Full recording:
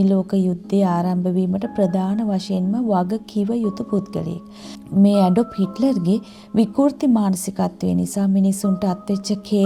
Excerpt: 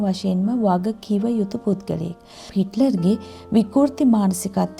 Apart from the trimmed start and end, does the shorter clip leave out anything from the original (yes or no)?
yes